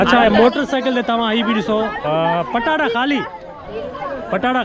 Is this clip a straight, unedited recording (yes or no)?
yes